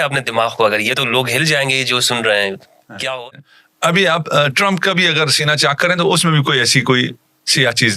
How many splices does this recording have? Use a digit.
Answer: 1